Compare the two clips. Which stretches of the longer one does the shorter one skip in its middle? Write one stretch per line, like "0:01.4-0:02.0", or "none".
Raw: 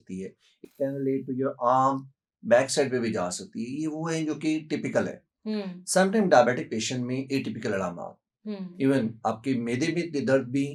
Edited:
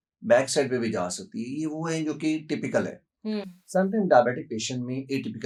none